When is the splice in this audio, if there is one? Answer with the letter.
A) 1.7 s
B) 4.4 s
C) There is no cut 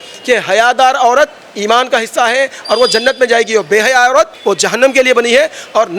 B